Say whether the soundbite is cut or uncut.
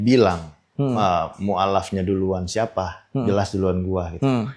uncut